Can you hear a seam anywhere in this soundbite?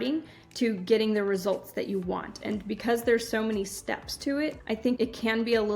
yes; 1 cut; at 4.8 s

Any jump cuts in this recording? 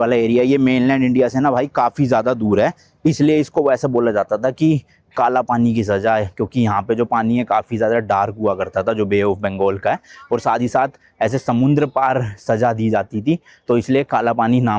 no; 0 cuts

